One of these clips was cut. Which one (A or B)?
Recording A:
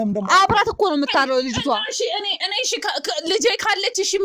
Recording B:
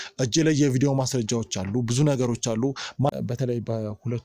B